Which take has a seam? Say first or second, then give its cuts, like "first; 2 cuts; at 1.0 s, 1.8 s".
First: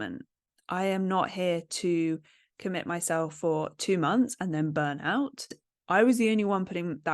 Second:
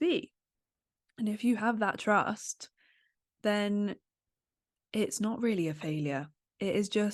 first; 1 cut; at 5.7 s